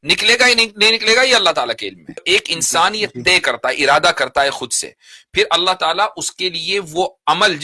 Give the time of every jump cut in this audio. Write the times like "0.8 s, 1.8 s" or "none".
2.2 s